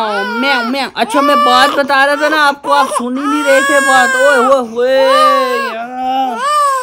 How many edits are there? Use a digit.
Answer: 0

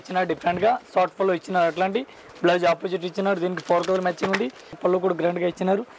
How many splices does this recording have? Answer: 1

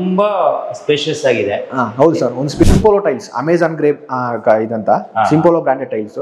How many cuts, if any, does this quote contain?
1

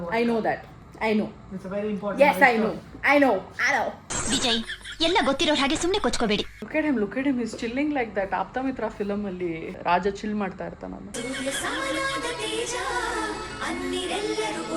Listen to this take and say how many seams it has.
2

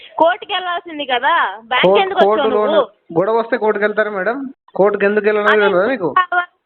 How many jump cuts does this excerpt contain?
1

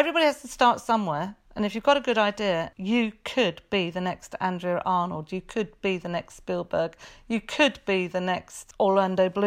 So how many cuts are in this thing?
2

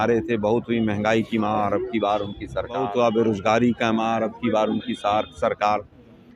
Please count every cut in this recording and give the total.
1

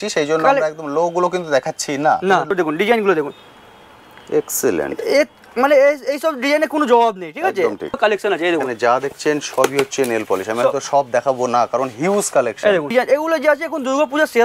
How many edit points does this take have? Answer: 3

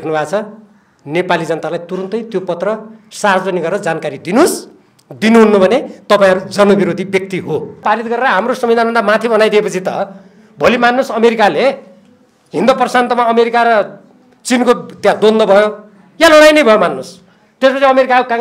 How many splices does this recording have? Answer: 1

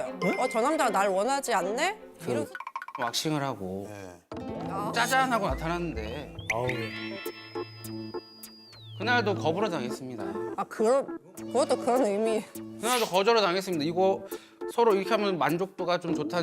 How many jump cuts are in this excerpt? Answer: 1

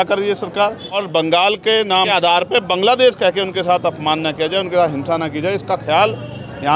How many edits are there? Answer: 2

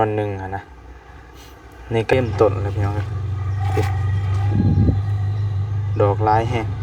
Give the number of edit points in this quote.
1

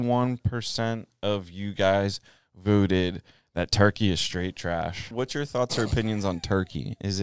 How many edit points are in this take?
1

